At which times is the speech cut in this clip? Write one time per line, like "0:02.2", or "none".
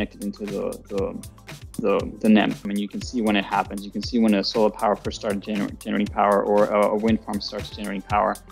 0:02.6